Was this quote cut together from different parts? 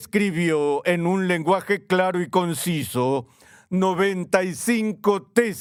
no; 0 cuts

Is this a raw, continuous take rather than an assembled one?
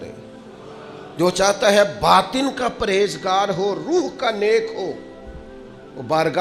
yes; 0 cuts

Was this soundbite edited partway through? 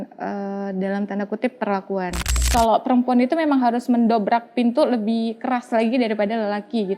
yes; 1 cut; at 2.4 s

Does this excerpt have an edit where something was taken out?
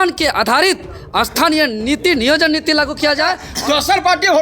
yes; 1 cut; at 3.5 s

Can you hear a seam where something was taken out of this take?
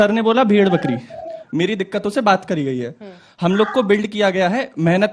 yes; 1 cut; at 1.5 s

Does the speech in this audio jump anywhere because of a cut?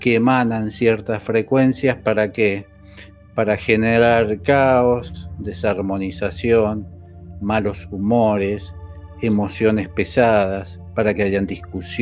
no; 0 cuts

